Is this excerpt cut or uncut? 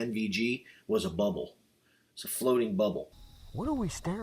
cut